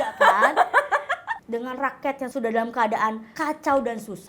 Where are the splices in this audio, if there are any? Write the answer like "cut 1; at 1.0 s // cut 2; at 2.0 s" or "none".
cut 1; at 1.3 s // cut 2; at 2.3 s // cut 3; at 3.3 s

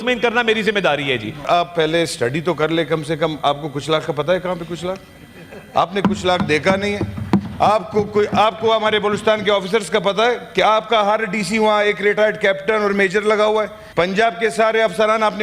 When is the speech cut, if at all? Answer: cut 1; at 1.5 s // cut 2; at 13.8 s

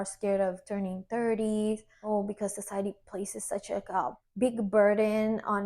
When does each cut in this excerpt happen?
none

